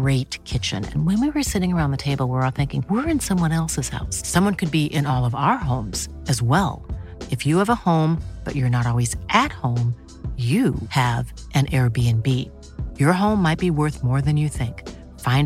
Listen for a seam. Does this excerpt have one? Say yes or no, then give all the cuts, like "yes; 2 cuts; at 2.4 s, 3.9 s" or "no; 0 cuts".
no; 0 cuts